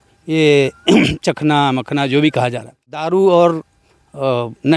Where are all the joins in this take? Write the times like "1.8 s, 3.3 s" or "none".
3.0 s

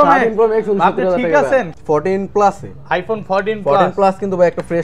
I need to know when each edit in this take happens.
1.7 s

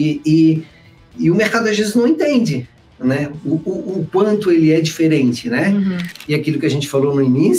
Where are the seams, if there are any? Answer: 6.1 s

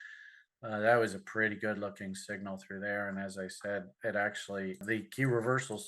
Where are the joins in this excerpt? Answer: 4.8 s

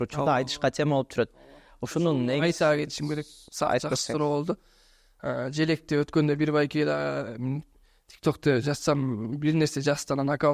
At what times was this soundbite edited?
none

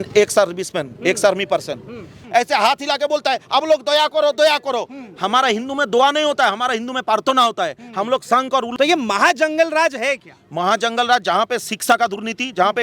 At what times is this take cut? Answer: 2.2 s, 8.7 s

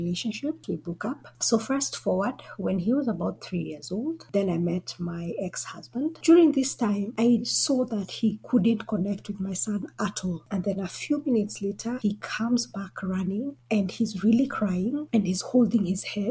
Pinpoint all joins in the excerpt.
1.0 s, 6.2 s, 10.4 s, 12.0 s

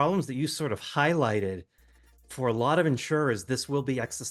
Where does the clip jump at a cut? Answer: none

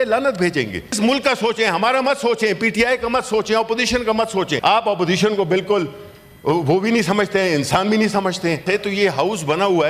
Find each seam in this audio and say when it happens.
1.0 s, 4.5 s, 8.6 s

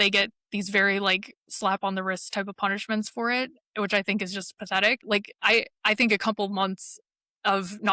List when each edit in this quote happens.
5.0 s

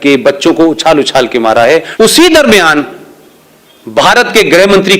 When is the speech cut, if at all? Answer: 1.9 s

